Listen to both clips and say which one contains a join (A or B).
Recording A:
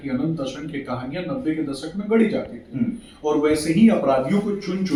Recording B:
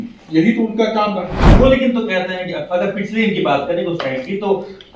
B